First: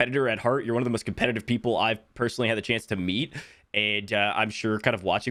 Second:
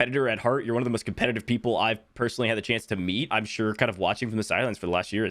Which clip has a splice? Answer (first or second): second